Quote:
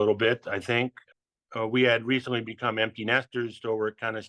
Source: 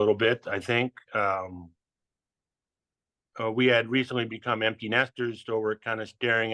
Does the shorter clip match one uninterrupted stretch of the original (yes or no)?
no